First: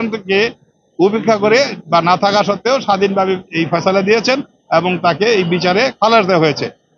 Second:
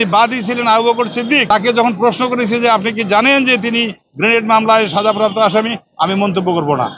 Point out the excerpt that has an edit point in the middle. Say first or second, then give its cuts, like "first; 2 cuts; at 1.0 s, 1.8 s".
second; 1 cut; at 1.4 s